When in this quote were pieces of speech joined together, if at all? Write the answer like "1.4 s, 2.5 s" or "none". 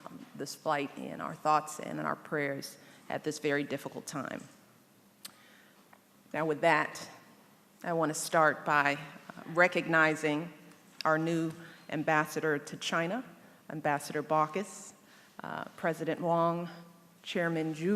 6.8 s